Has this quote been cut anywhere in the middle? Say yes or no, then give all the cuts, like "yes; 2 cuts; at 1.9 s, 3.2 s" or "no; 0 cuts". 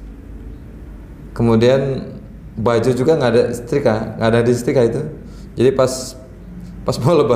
no; 0 cuts